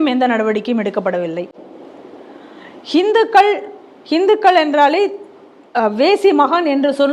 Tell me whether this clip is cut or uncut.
uncut